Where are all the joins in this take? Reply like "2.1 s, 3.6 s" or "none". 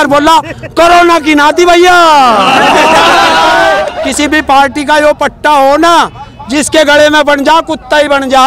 3.9 s